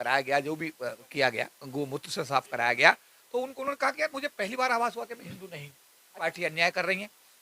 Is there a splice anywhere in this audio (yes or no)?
yes